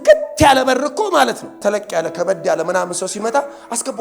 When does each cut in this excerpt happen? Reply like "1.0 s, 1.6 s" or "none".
1.6 s